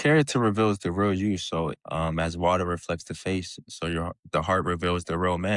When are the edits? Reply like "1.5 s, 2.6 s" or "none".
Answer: 1.8 s